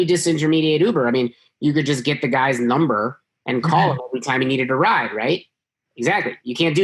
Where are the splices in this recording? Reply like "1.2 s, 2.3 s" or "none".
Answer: none